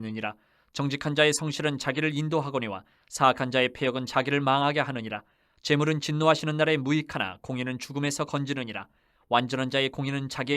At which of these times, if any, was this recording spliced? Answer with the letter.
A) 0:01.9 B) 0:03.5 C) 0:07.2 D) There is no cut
B